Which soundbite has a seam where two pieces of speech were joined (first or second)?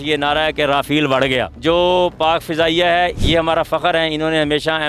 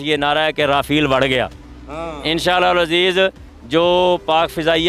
first